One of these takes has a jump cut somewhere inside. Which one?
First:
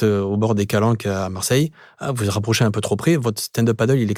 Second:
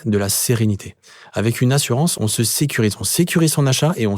second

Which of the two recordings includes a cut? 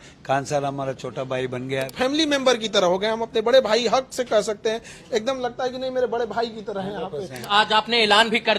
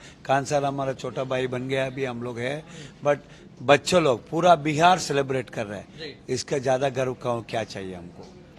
first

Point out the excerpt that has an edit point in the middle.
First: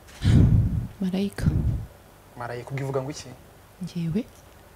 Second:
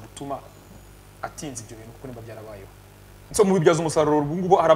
second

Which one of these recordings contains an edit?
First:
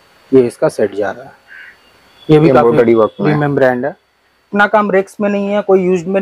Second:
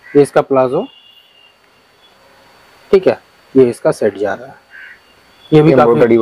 first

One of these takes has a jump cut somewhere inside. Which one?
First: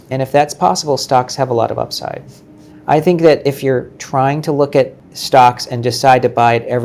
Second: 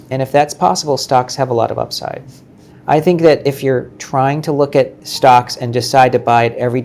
second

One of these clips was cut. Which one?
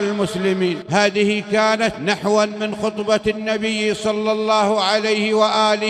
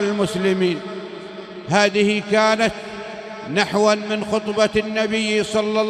first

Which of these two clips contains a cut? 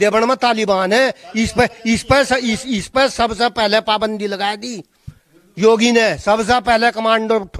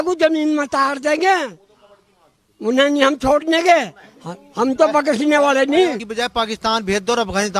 second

